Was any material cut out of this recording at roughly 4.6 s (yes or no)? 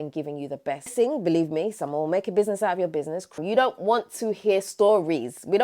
no